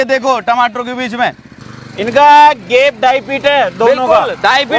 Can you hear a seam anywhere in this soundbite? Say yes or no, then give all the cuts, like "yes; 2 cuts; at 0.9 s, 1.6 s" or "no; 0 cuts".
no; 0 cuts